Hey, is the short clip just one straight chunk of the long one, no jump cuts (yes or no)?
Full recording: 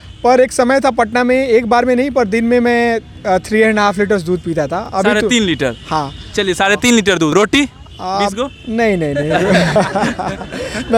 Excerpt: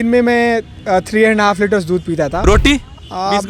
no